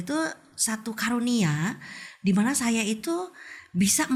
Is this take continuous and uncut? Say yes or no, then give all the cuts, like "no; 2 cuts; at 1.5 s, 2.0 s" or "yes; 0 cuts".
yes; 0 cuts